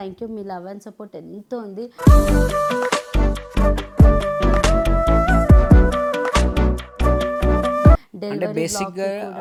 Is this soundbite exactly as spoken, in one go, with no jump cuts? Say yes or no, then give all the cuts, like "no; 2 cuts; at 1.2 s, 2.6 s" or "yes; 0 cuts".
yes; 0 cuts